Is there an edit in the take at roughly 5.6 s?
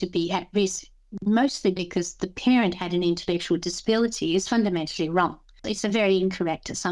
yes; 1 cut; at 5.6 s

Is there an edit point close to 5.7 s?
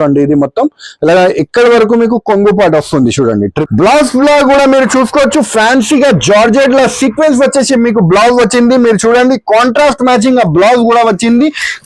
no; 1 cut; at 3.6 s

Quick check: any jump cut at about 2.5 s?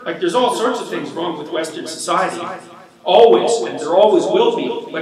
no; 0 cuts

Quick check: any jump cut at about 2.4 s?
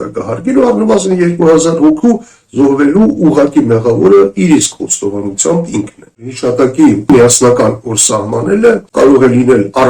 no; 3 cuts; at 6.3 s, 7.1 s, 8.9 s

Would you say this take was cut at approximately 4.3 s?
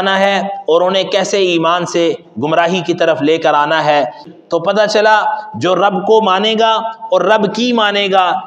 yes; 1 cut; at 4.3 s

